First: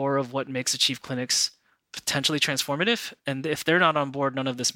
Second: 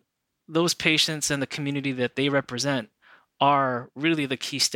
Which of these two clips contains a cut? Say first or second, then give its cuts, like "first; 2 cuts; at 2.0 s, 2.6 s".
first; 1 cut; at 3.1 s